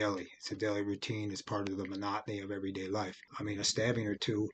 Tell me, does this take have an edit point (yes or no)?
yes